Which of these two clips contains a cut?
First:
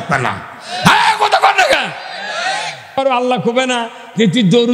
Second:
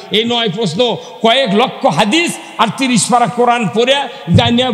first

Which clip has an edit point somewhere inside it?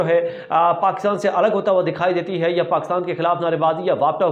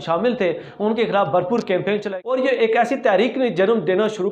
second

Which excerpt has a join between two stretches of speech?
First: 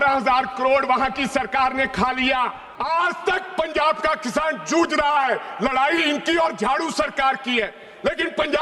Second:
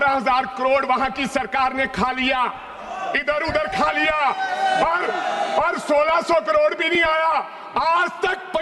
first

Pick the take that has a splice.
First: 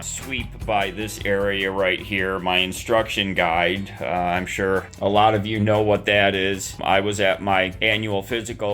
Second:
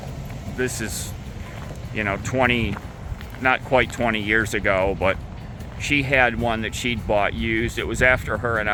first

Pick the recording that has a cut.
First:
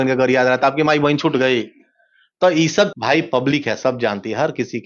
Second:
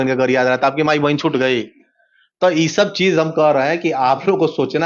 first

